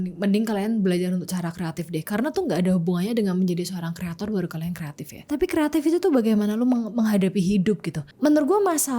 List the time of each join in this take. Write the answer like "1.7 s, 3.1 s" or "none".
5.2 s, 8.0 s